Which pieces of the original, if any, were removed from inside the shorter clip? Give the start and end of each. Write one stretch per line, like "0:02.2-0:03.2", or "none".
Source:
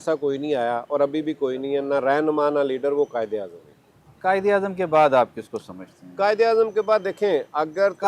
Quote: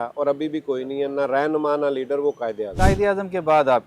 0:03.4-0:04.1